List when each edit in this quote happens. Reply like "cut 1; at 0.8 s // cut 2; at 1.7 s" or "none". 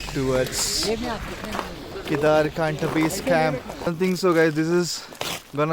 cut 1; at 3.9 s